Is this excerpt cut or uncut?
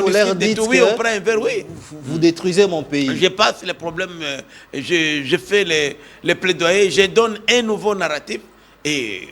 uncut